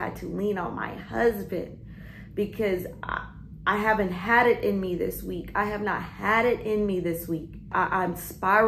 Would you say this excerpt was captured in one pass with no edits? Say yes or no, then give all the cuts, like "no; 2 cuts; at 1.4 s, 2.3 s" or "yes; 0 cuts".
no; 1 cut; at 7.7 s